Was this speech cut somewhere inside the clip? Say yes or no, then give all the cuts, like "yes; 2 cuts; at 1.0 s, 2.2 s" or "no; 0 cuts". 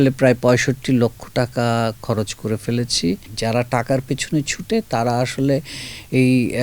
yes; 1 cut; at 3.3 s